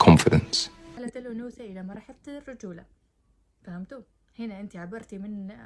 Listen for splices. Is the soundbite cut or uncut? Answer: cut